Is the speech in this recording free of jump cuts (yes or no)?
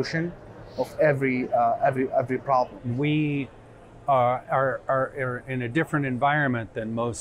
yes